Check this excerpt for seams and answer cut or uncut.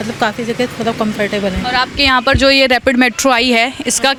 uncut